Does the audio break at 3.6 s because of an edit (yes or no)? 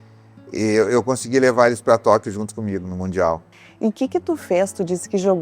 yes